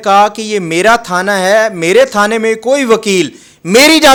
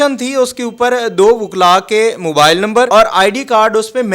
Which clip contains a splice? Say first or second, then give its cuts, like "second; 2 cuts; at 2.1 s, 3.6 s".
second; 1 cut; at 2.9 s